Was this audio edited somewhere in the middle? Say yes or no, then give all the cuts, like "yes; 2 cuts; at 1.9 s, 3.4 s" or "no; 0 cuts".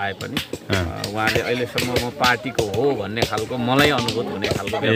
no; 0 cuts